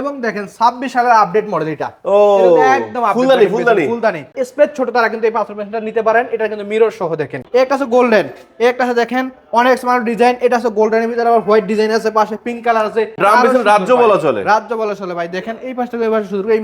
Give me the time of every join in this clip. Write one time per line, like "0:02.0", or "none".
0:04.4
0:07.4
0:13.2